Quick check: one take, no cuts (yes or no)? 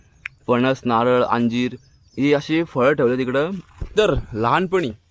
yes